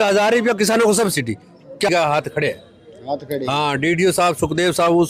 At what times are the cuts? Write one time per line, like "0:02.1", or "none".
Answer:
0:01.9